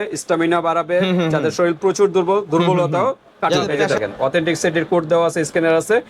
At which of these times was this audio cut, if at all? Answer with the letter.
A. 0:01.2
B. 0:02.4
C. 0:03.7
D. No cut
C